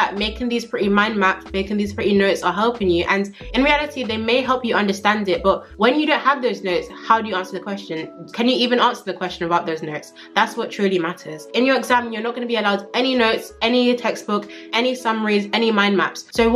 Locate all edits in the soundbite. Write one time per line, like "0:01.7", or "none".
none